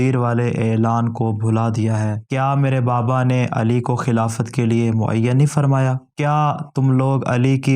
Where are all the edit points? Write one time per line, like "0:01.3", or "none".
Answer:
0:02.2